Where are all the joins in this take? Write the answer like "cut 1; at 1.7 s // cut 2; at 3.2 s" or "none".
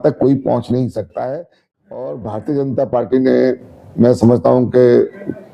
cut 1; at 1.7 s